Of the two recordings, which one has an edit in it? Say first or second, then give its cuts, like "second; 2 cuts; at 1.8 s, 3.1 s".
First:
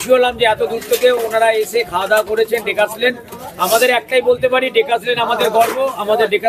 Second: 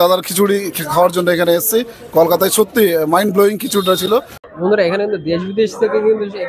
second; 1 cut; at 4.4 s